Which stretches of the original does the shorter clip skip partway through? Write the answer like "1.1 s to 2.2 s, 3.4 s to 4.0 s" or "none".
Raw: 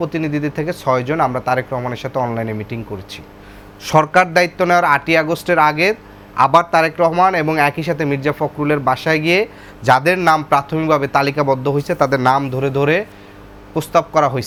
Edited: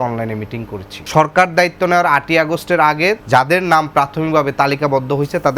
3.1 s to 3.7 s, 6.0 s to 9.8 s